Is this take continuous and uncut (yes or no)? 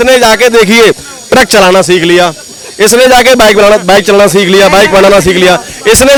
yes